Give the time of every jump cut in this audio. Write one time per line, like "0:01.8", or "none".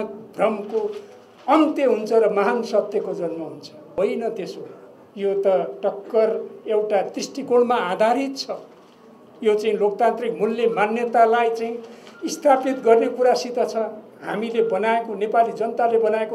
0:03.8